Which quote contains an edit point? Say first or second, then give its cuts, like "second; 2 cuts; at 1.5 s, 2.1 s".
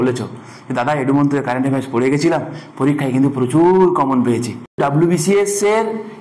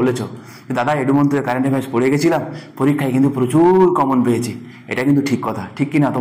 first; 1 cut; at 4.8 s